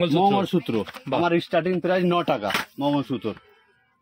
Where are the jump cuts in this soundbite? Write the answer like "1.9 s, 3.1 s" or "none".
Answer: none